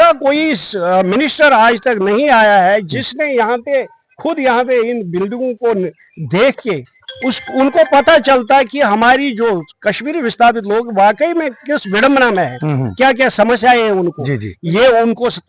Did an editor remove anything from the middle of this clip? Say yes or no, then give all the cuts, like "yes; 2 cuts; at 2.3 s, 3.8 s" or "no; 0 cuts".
no; 0 cuts